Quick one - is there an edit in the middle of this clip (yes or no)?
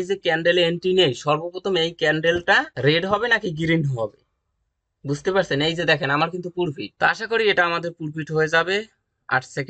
yes